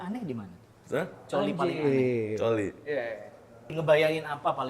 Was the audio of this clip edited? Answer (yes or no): yes